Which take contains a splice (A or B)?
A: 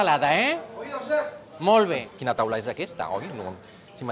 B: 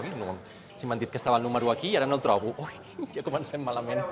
A